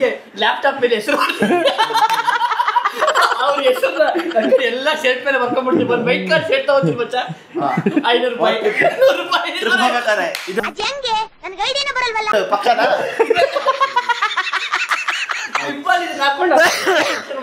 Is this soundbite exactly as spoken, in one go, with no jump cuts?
yes; 0 cuts

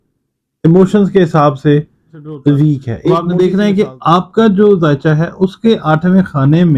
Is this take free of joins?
no; 1 cut; at 3.2 s

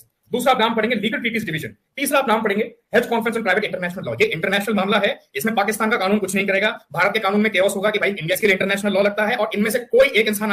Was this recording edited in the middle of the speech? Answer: yes; 1 cut; at 8.4 s

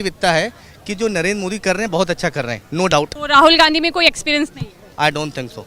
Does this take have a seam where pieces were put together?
yes; 1 cut; at 3.2 s

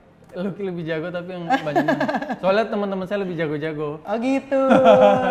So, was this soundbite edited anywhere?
no; 0 cuts

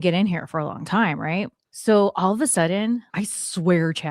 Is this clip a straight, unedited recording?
no; 2 cuts; at 1.6 s, 3.1 s

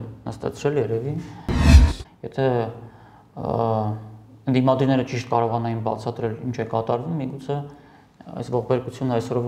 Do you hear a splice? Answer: yes; 1 cut; at 1.8 s

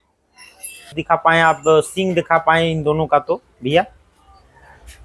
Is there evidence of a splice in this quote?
yes; 1 cut; at 1.0 s

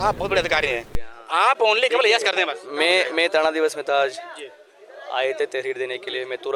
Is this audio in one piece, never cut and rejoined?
yes; 0 cuts

